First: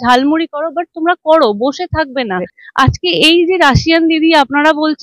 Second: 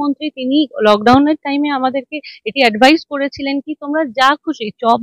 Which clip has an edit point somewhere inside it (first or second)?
first